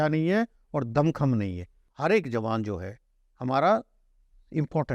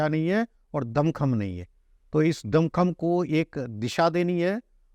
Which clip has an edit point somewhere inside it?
first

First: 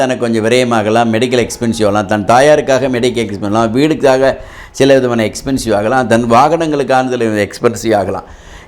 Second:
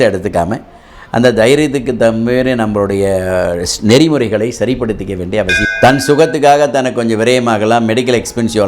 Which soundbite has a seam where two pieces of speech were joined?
second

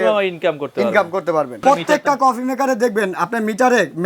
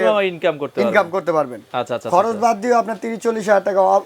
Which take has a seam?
first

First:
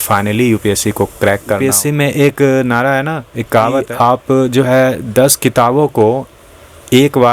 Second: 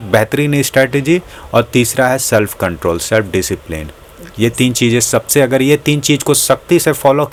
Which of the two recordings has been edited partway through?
first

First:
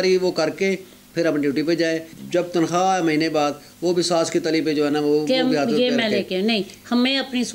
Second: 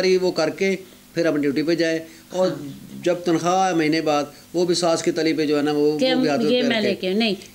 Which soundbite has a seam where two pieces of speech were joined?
first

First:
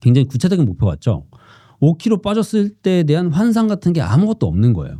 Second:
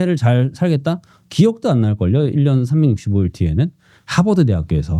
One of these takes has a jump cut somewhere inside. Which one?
second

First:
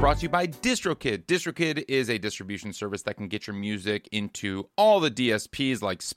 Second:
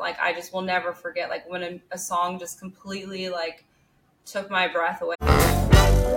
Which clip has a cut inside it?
second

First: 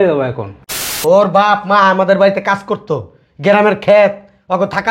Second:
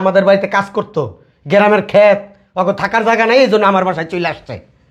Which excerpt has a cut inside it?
first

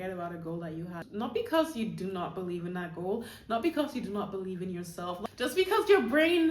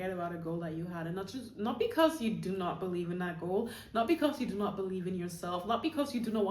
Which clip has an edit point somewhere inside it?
first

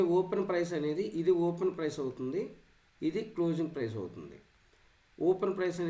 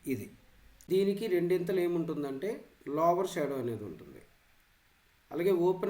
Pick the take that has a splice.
second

